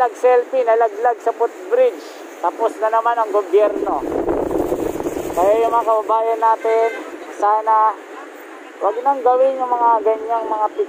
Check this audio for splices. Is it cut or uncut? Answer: uncut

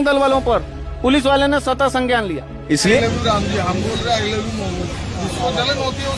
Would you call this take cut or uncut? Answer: cut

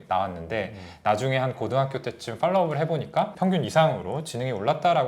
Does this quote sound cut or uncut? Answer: uncut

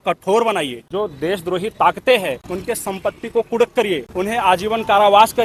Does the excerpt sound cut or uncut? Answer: uncut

